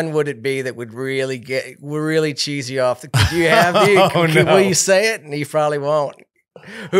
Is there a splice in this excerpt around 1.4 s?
no; 0 cuts

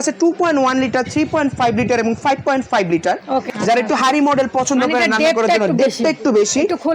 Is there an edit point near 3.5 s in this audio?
yes; 1 cut; at 3.5 s

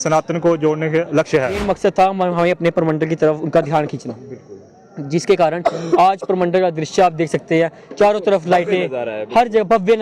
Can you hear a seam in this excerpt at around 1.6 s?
yes; 1 cut; at 1.6 s

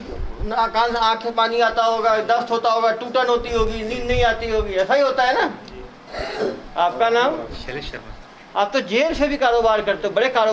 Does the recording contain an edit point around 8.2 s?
no; 1 cut; at 6.2 s

